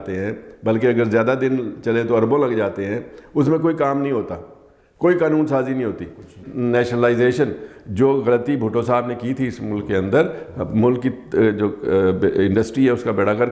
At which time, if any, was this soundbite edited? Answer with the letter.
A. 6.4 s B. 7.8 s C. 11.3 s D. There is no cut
A